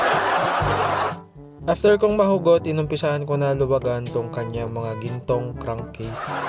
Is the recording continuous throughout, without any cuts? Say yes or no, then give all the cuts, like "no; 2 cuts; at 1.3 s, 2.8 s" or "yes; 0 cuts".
no; 1 cut; at 1.1 s